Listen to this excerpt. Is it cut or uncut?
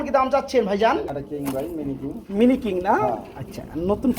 cut